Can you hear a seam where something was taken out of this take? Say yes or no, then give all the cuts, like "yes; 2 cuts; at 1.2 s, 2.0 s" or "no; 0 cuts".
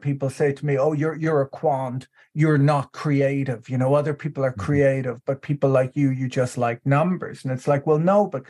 no; 0 cuts